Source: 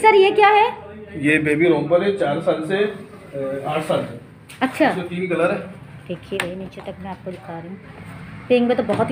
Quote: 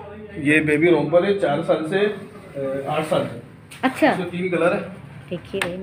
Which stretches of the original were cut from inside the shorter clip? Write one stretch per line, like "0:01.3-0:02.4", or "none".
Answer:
none

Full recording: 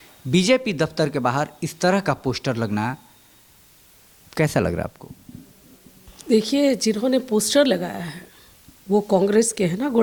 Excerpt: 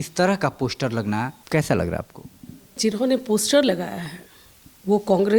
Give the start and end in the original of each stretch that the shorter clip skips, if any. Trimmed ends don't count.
0:03.0-0:04.2
0:05.6-0:06.8

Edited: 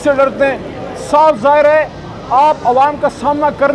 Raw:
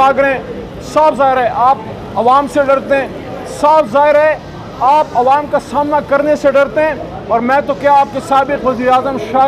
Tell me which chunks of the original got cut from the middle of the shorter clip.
none

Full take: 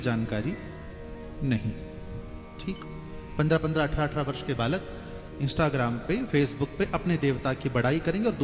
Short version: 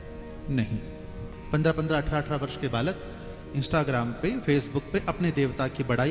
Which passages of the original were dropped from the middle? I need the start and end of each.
0:02.3-0:03.2

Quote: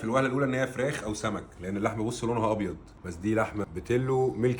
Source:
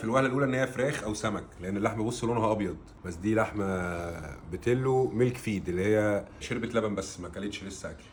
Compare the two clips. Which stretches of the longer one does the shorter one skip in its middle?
0:03.6-0:04.4

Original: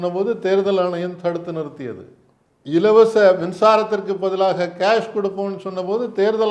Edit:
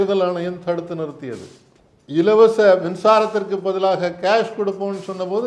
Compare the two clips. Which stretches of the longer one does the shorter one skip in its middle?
none

